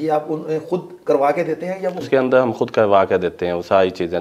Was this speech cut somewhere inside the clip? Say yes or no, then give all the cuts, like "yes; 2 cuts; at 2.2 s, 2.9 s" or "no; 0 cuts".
yes; 1 cut; at 2.0 s